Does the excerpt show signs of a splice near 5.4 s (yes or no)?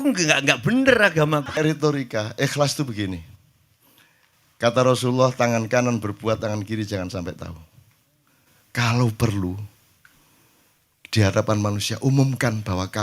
no